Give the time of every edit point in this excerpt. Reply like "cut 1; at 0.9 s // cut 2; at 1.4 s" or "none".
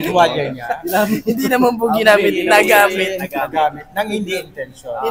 none